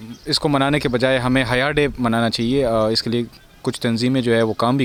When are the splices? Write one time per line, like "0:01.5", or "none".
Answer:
none